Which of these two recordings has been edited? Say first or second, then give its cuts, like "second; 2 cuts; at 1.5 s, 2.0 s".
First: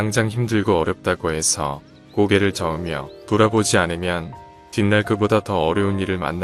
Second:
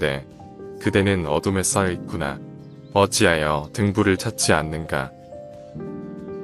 second; 1 cut; at 5.4 s